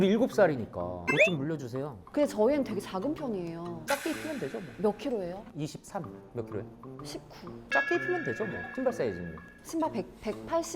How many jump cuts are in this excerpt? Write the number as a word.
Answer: three